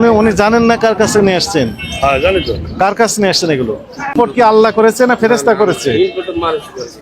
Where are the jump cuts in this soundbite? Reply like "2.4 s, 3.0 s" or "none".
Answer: 4.1 s